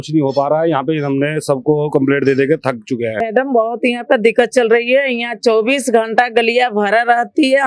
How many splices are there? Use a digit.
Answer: 1